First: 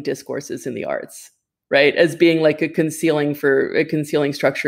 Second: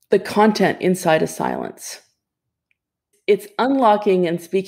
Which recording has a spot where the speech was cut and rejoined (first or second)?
second